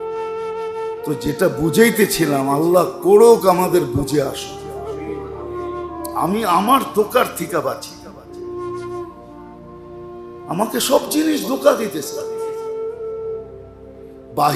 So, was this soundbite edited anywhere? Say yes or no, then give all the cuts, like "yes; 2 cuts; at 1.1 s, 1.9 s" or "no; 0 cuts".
yes; 4 cuts; at 4.3 s, 6.2 s, 12.0 s, 13.7 s